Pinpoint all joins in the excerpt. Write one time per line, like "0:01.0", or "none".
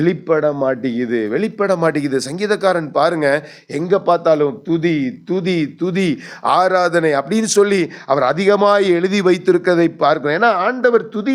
none